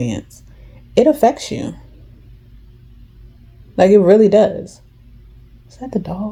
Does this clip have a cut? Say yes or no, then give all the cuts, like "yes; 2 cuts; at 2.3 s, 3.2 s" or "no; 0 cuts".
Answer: no; 0 cuts